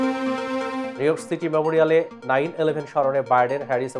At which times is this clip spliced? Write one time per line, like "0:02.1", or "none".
0:00.9